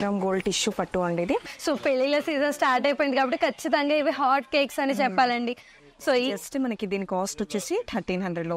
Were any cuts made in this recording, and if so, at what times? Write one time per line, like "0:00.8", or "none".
0:01.5
0:05.7